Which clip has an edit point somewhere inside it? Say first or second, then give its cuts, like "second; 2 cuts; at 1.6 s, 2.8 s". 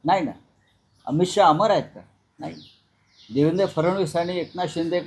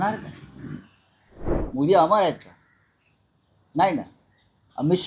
second; 1 cut; at 1.6 s